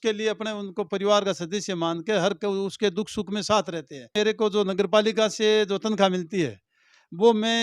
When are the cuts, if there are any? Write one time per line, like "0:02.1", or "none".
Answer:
0:04.1